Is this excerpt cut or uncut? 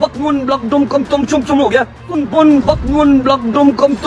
uncut